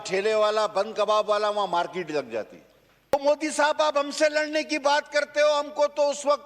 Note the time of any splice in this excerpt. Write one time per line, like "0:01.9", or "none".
0:03.1

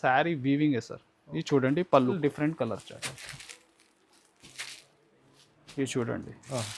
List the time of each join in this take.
0:02.2

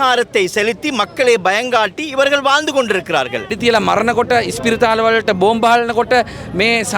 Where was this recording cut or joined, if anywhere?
0:03.5

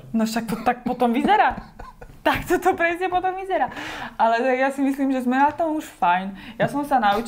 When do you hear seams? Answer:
none

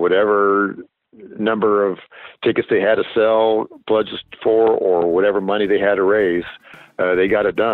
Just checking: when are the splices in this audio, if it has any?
none

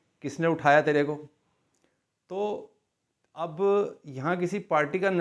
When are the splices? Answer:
none

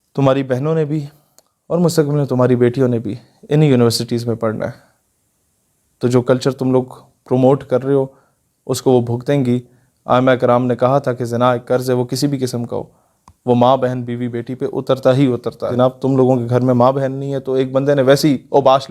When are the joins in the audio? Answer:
0:15.7

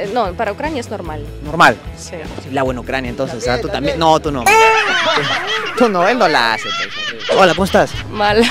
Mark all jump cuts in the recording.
0:07.2

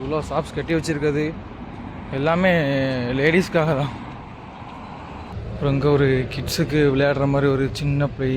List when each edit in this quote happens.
0:05.3

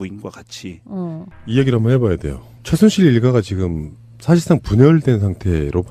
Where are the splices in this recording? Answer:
0:01.2

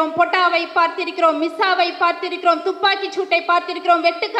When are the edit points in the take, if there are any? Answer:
none

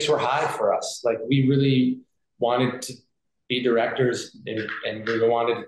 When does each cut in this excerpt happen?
none

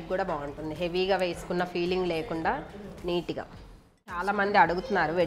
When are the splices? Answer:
0:04.2

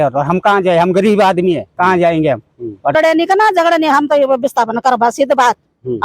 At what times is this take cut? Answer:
0:02.9

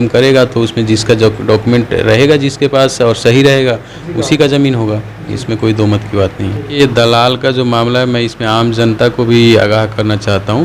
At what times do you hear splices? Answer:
0:06.7

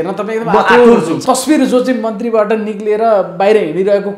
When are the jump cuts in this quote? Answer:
0:01.2

